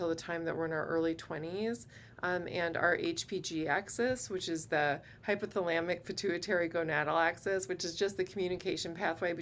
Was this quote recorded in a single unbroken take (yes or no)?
yes